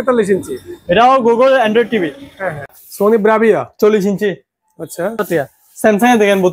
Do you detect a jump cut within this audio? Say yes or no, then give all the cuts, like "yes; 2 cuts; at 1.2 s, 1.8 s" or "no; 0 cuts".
yes; 2 cuts; at 2.8 s, 5.2 s